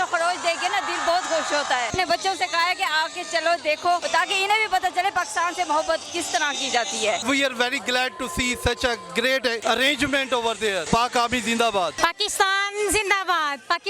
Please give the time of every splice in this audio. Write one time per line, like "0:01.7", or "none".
0:01.9
0:04.0
0:07.2
0:09.6
0:10.8
0:11.9